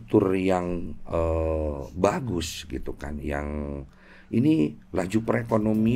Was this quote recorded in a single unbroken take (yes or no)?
yes